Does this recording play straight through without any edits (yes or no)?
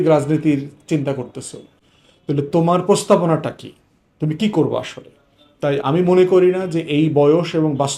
yes